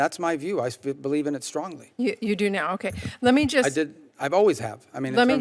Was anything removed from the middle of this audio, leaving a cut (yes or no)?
no